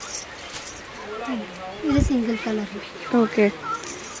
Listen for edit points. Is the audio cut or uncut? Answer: uncut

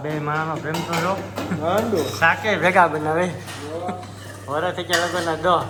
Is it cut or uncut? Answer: uncut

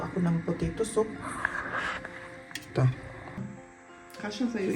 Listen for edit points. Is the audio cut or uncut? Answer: cut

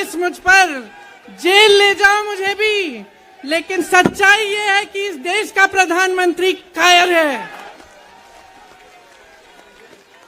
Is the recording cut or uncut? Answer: cut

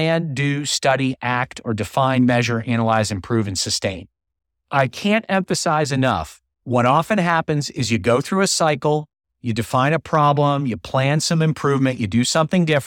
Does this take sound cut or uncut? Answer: uncut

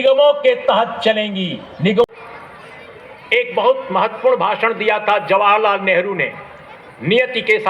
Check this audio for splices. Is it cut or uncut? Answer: cut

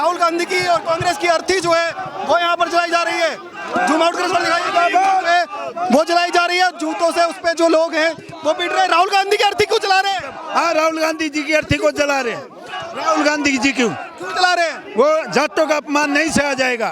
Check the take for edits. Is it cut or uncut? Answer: uncut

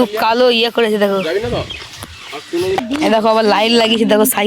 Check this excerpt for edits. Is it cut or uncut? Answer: cut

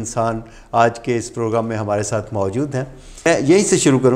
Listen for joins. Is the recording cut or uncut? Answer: cut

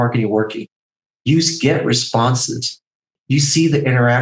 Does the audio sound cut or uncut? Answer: cut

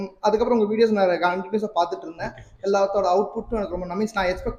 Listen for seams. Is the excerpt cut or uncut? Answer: uncut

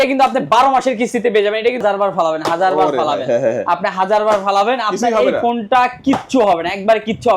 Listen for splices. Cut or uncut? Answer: cut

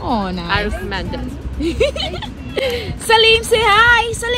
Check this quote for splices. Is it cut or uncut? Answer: uncut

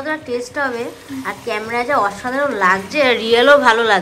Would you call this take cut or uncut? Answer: uncut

